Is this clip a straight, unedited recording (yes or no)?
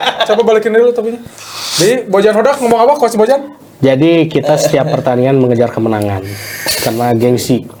yes